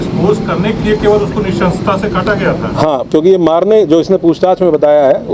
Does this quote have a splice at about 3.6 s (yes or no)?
no